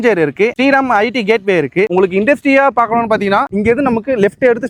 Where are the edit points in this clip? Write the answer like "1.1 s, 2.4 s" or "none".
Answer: none